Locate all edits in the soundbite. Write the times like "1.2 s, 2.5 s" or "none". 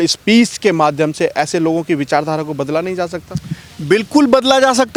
none